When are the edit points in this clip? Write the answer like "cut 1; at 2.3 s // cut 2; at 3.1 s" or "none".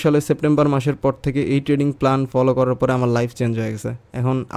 none